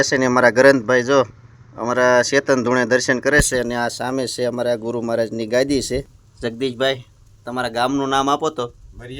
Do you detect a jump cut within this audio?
yes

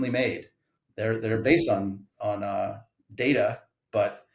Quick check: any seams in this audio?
yes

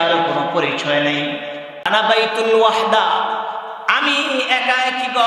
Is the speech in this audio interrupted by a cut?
yes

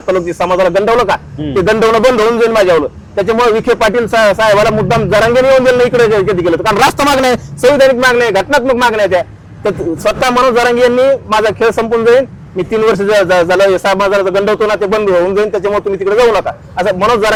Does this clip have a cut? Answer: no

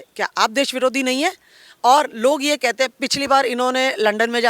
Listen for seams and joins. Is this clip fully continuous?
yes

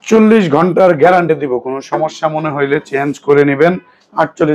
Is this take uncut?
yes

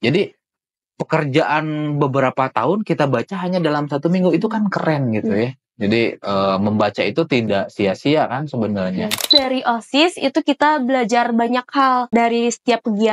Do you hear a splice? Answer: yes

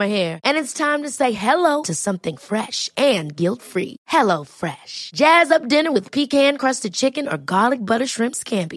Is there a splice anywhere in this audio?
no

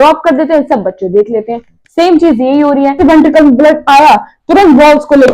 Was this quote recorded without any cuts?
no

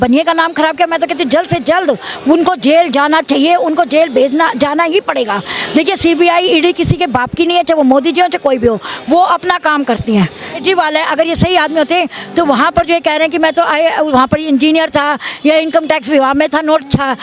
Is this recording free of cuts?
no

